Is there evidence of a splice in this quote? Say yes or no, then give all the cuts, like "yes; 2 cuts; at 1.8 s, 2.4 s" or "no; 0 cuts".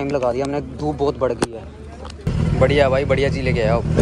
yes; 1 cut; at 2.3 s